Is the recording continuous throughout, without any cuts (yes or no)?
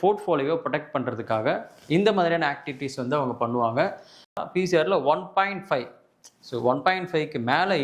no